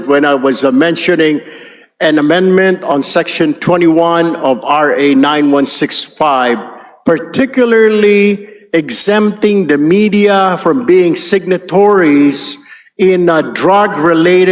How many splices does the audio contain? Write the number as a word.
zero